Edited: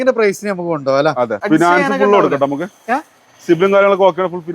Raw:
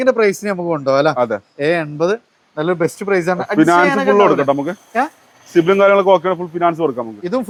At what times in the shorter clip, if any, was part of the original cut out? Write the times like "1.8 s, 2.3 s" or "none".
1.4 s